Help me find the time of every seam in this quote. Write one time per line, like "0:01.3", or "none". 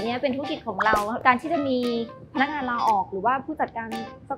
0:01.2